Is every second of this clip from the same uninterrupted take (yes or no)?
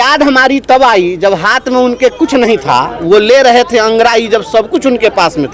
yes